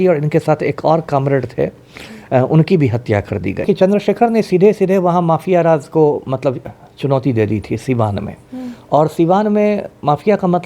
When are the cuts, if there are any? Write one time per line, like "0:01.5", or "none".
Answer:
0:03.7